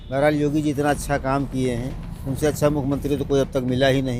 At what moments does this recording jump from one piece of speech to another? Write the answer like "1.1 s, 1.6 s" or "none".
none